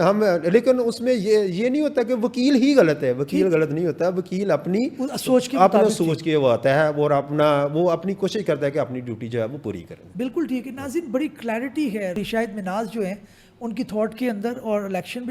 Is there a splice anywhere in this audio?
no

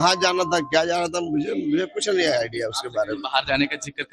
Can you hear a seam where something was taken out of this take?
no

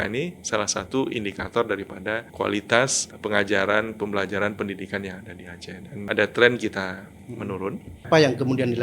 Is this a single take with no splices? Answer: no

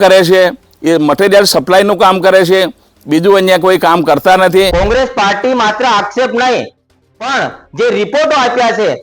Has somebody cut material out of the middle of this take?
yes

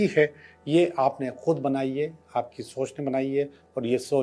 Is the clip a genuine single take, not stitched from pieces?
yes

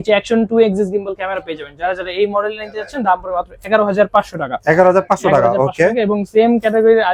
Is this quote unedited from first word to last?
yes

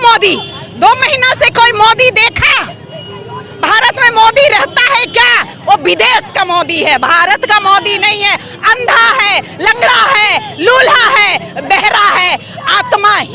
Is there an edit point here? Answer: no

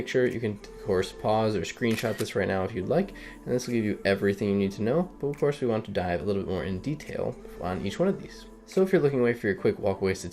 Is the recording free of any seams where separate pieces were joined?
no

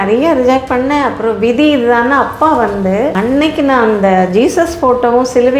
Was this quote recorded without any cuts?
no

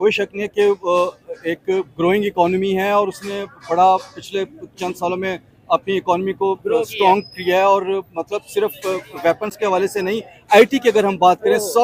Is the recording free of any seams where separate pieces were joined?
yes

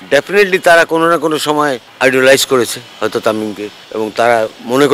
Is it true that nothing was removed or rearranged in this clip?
no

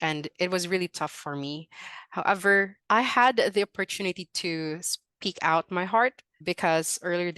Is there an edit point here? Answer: yes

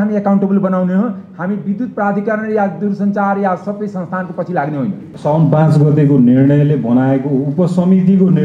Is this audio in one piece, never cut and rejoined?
no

